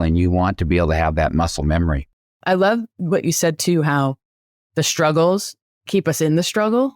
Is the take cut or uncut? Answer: cut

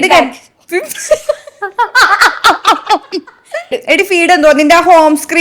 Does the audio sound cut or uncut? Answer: cut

